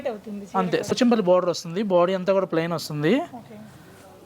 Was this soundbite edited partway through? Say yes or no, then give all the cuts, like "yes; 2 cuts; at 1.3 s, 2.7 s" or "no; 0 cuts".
yes; 1 cut; at 0.9 s